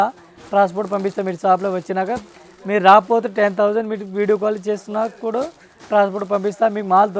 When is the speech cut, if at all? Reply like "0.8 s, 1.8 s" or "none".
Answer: none

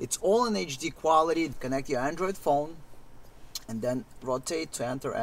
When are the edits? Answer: 1.6 s

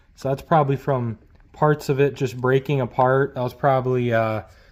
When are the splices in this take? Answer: none

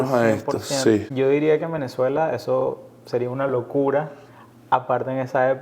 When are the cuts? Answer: 1.1 s

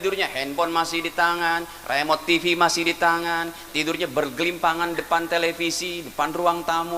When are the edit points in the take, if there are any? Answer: none

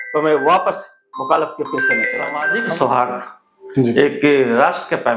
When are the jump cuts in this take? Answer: 2.4 s

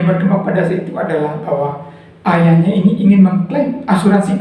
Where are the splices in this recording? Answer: none

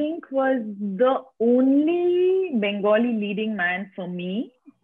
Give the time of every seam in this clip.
none

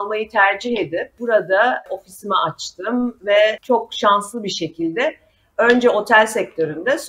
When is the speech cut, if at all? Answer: 1.1 s

